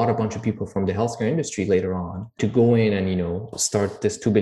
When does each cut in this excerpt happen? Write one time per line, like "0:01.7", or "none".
0:02.3
0:03.5

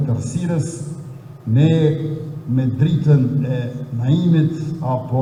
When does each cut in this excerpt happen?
none

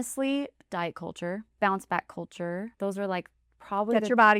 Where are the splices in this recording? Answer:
0:01.5
0:02.7

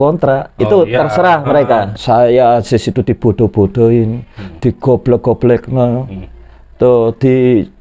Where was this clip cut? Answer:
0:01.9

